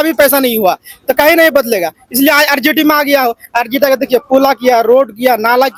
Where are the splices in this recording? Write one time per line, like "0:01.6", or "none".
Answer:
none